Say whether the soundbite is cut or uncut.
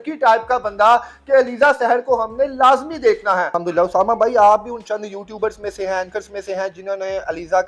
cut